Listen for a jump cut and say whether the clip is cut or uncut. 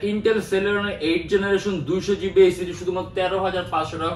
uncut